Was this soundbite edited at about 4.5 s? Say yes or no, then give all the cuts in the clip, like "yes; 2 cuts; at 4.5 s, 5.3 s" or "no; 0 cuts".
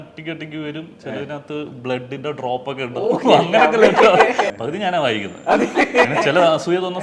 yes; 1 cut; at 4.5 s